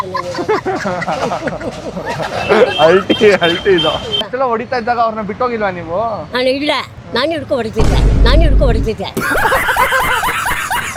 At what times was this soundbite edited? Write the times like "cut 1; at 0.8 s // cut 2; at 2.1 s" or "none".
none